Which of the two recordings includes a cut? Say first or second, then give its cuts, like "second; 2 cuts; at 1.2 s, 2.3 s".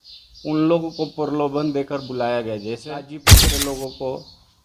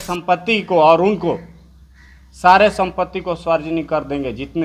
first; 1 cut; at 3.5 s